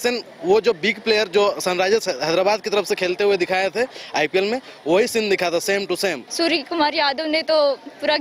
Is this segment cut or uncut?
cut